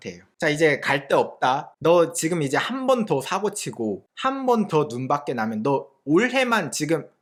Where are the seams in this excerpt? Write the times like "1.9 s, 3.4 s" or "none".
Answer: none